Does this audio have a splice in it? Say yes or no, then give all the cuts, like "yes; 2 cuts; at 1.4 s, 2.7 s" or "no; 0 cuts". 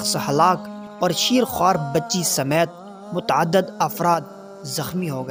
no; 0 cuts